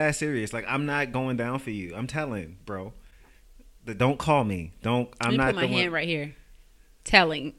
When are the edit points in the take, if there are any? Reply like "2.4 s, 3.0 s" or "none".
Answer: none